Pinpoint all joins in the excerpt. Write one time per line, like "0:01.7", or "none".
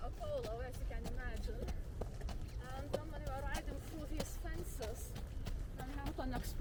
none